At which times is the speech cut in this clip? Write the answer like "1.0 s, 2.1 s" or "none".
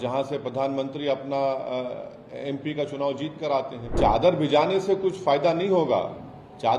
3.9 s

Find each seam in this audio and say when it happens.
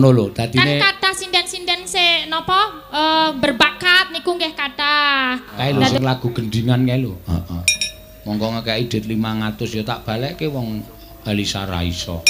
6.0 s

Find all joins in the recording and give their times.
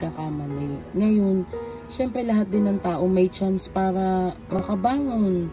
4.6 s

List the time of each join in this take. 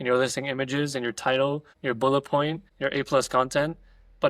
1.7 s, 2.7 s

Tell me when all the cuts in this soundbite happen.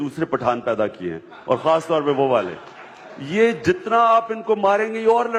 none

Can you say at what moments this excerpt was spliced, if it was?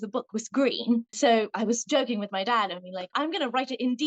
1.2 s, 3.1 s

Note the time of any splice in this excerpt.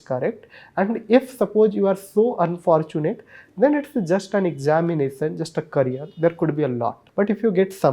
7.0 s

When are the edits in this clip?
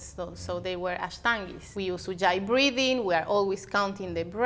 1.6 s

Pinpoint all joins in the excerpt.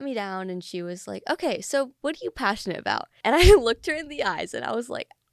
3.1 s

